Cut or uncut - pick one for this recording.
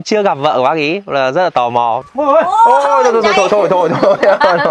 cut